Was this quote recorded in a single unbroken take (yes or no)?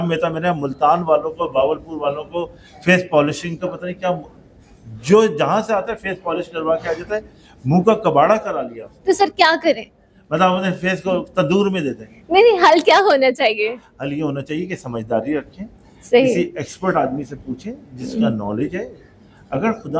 yes